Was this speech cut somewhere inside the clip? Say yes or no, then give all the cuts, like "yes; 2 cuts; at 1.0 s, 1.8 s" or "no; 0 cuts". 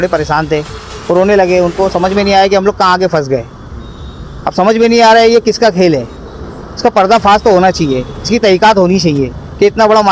no; 0 cuts